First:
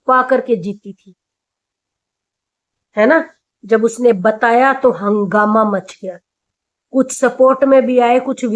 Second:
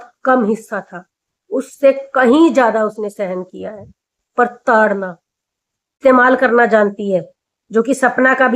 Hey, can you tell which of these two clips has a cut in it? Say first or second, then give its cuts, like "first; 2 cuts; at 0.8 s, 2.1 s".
second; 1 cut; at 6.0 s